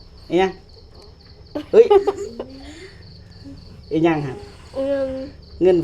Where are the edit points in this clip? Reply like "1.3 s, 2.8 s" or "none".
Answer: none